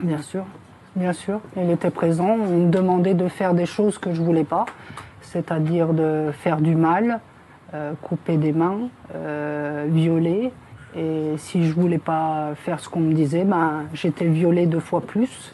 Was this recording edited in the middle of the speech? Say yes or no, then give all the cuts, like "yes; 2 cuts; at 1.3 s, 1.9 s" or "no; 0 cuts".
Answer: no; 0 cuts